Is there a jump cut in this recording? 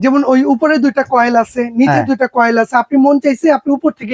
no; 0 cuts

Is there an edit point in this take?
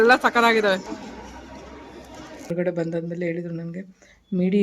yes; 1 cut; at 2.5 s

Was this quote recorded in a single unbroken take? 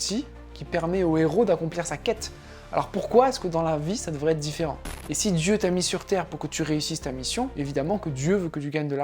no; 2 cuts; at 4.9 s, 7.5 s

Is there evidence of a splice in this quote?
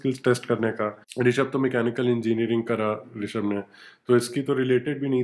yes; 1 cut; at 1.0 s

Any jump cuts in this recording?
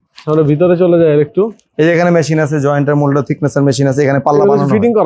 no; 0 cuts

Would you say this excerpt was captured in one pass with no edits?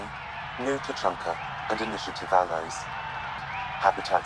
no; 1 cut; at 3.4 s

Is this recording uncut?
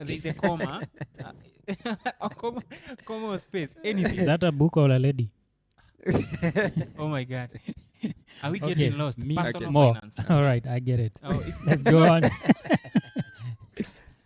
yes; 0 cuts

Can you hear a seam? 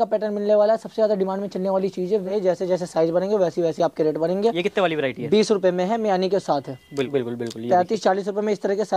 yes; 2 cuts; at 2.3 s, 7.1 s

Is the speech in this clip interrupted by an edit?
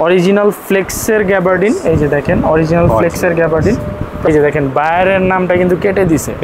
yes; 1 cut; at 4.3 s

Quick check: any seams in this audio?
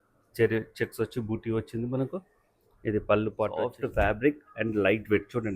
yes; 1 cut; at 3.7 s

